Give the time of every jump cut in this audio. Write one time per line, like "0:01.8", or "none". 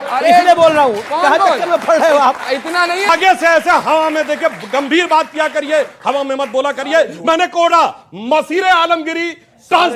0:03.1